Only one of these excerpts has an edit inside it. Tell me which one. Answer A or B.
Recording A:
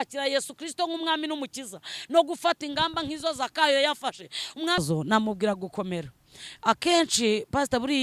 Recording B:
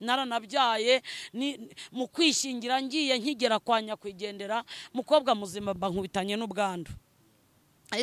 A